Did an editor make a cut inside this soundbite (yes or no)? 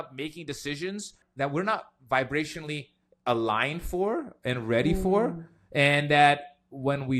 yes